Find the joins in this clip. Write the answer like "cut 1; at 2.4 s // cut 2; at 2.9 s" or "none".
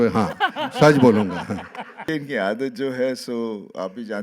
cut 1; at 2.0 s